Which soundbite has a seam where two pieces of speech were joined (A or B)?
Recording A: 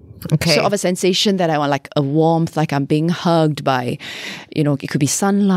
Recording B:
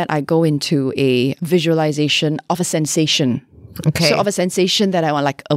B